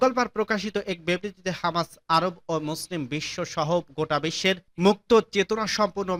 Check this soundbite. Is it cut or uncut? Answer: uncut